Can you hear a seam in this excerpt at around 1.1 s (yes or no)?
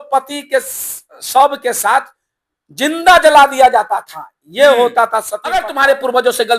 no